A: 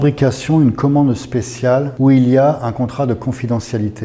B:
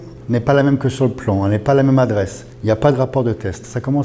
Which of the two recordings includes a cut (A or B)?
A